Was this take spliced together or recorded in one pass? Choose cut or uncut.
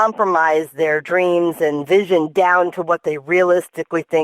uncut